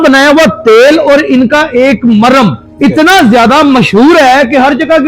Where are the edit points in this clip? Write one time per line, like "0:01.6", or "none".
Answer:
0:02.6